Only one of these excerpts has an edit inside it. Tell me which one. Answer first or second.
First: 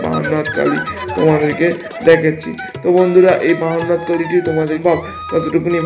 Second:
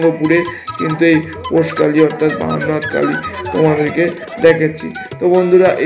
first